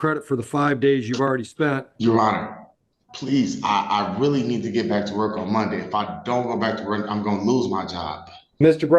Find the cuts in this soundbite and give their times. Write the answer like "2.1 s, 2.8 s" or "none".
1.9 s